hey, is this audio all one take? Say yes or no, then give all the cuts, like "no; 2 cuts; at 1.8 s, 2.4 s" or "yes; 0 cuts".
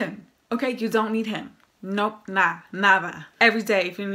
no; 1 cut; at 3.2 s